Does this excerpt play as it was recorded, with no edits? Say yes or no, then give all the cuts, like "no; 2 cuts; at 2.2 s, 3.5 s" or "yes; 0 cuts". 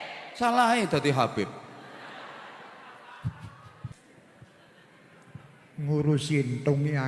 no; 1 cut; at 3.9 s